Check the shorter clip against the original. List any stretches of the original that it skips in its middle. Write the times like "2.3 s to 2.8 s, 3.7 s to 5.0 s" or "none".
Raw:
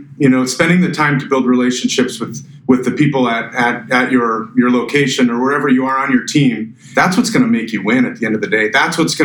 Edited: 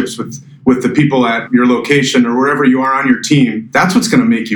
3.5 s to 4.5 s, 6.7 s to 6.9 s